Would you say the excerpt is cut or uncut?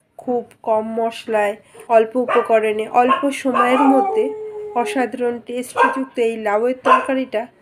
cut